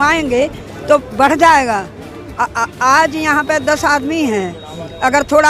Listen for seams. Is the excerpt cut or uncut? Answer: uncut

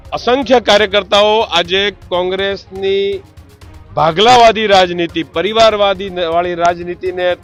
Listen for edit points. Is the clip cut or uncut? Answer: uncut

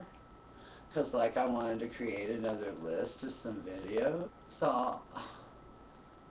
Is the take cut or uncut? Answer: uncut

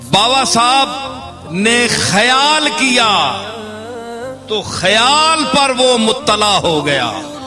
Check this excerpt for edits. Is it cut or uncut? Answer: cut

